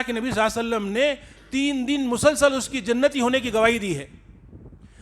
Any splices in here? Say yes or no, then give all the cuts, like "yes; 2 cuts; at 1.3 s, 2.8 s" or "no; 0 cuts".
no; 0 cuts